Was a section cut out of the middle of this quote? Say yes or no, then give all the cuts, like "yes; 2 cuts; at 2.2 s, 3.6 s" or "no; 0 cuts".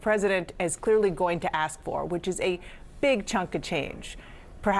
no; 0 cuts